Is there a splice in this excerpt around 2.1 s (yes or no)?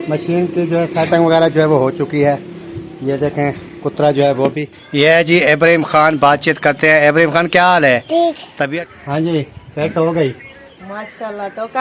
no